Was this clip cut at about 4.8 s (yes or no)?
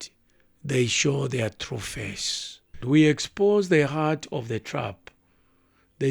no